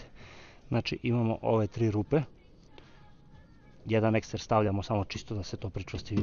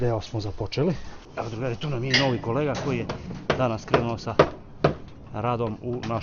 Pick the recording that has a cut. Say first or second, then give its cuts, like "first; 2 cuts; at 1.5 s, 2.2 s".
second; 1 cut; at 1.2 s